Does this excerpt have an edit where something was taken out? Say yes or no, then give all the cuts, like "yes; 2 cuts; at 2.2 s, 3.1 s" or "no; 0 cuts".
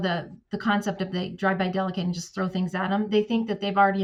no; 0 cuts